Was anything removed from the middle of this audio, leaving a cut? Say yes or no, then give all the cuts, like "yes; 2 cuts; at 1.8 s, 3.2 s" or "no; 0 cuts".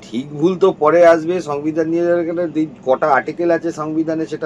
no; 0 cuts